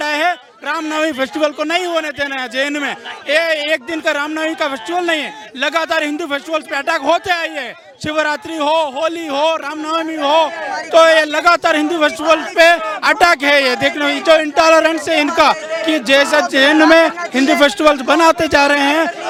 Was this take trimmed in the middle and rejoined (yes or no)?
no